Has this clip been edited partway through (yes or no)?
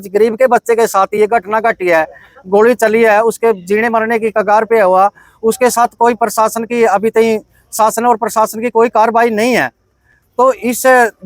no